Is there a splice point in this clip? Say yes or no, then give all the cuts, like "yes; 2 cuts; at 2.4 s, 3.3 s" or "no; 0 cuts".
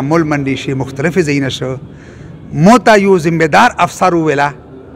no; 0 cuts